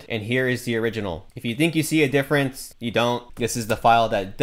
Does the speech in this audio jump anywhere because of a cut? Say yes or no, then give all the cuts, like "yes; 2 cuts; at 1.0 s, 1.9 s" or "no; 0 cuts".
yes; 1 cut; at 3.3 s